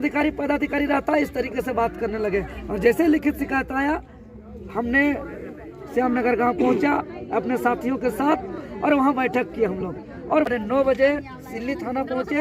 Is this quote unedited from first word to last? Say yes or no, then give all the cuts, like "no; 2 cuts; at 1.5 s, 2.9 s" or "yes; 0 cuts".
no; 1 cut; at 10.5 s